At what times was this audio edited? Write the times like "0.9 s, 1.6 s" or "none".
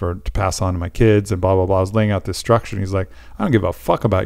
none